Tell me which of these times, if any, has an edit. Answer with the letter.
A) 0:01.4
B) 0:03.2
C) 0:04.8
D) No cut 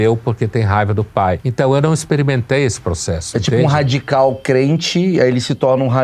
A